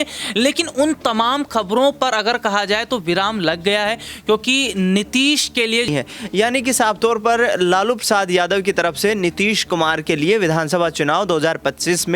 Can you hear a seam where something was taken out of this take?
yes; 1 cut; at 5.9 s

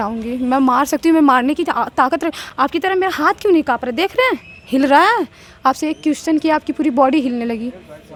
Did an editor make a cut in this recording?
no; 0 cuts

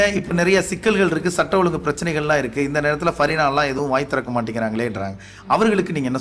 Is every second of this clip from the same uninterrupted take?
yes; 0 cuts

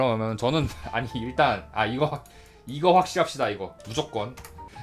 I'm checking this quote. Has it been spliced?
yes; 1 cut; at 3.8 s

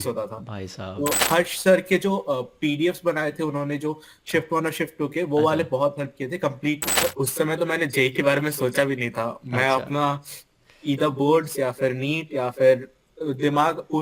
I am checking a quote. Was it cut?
yes; 2 cuts; at 1.2 s, 6.9 s

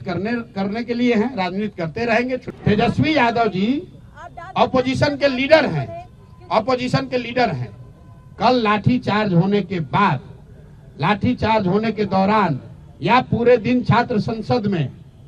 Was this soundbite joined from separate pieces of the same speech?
yes; 1 cut; at 2.4 s

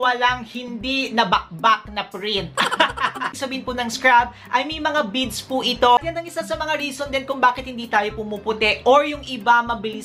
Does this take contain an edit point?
yes; 2 cuts; at 3.4 s, 6.0 s

